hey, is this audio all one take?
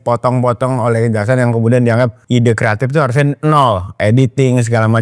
no; 2 cuts; at 2.2 s, 4.0 s

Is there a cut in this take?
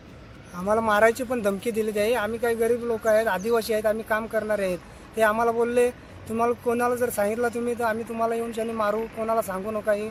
no; 0 cuts

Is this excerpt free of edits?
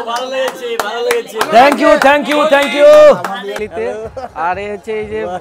no; 1 cut; at 3.6 s

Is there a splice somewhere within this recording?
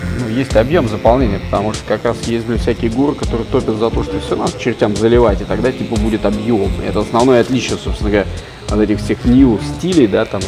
no; 0 cuts

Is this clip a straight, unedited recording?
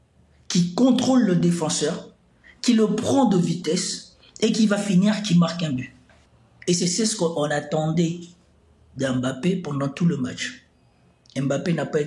yes; 0 cuts

